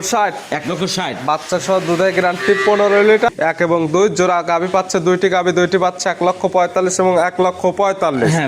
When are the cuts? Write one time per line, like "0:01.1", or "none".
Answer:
0:03.3